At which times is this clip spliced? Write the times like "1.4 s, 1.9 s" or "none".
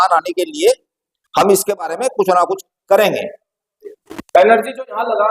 4.0 s